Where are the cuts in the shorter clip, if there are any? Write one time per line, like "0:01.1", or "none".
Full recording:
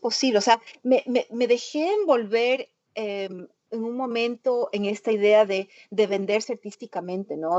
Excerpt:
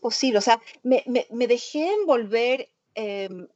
none